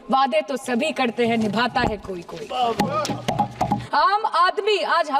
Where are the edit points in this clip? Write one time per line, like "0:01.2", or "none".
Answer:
0:03.8